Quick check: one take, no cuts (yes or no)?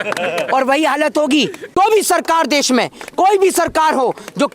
no